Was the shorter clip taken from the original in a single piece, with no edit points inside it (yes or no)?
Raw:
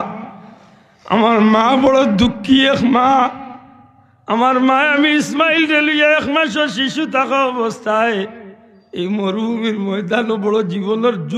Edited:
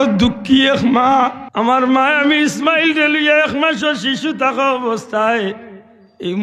no